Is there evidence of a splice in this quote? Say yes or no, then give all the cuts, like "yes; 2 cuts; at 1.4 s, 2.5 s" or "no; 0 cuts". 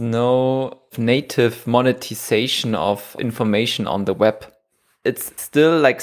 yes; 1 cut; at 0.9 s